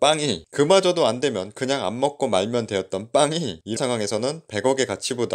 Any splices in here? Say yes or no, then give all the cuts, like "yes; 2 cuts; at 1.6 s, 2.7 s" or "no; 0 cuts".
yes; 1 cut; at 3.8 s